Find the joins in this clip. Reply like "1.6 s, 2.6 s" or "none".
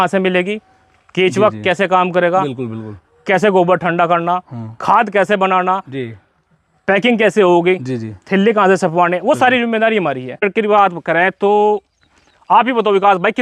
10.4 s